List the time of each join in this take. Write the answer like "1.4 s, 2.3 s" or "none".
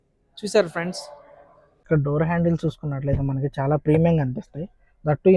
1.7 s

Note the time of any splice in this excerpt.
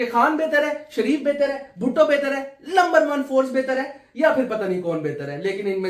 none

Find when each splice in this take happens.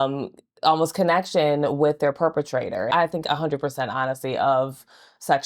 2.9 s

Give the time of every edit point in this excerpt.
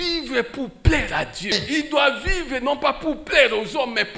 1.5 s

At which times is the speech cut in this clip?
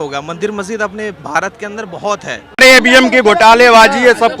2.6 s

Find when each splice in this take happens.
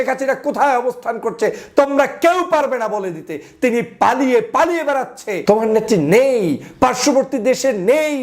5.3 s

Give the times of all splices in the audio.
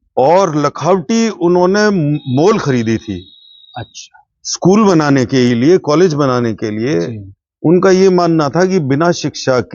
none

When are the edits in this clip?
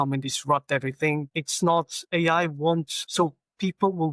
none

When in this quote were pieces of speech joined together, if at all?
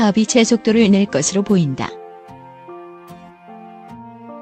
1.9 s

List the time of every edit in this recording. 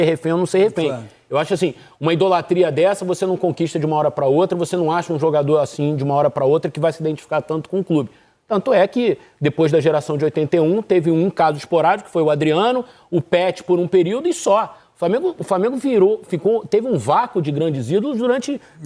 none

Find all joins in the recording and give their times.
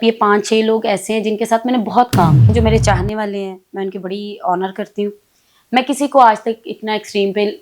2.5 s

